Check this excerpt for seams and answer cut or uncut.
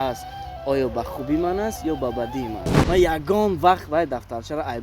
cut